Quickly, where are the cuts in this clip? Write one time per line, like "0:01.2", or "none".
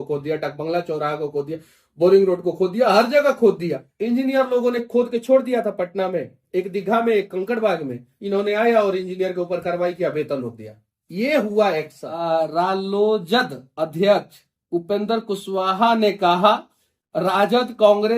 0:03.9
0:12.1